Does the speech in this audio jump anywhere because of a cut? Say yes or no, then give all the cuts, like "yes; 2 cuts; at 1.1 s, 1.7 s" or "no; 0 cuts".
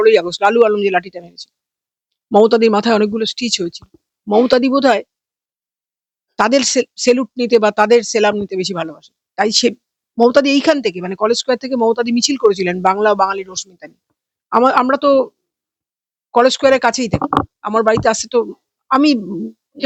no; 0 cuts